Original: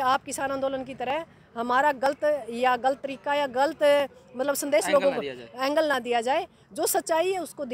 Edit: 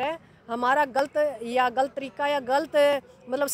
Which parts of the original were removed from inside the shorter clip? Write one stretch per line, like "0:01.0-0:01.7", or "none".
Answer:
none